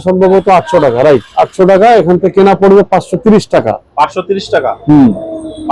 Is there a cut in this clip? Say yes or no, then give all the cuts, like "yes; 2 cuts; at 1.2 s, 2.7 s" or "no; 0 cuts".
no; 0 cuts